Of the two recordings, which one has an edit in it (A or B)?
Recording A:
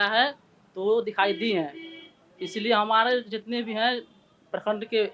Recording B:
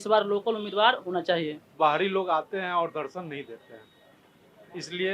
B